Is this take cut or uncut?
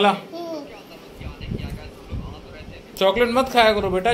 uncut